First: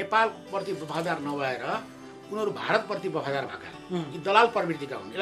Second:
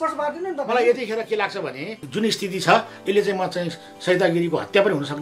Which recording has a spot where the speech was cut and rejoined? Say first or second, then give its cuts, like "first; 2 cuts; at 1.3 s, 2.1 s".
second; 1 cut; at 2.0 s